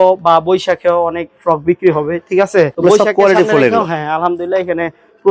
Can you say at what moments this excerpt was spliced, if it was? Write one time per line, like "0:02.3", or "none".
none

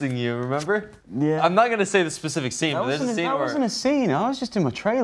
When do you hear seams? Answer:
0:01.0

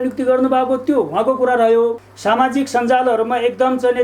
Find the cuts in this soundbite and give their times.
0:02.1

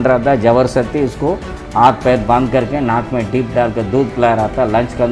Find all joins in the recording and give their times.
none

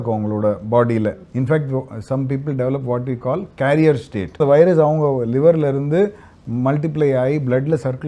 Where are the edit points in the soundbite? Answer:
0:01.2
0:04.4

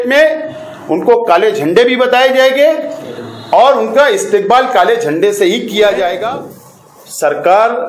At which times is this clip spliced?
0:06.2

